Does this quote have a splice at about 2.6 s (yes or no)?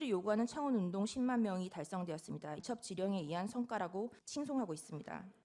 yes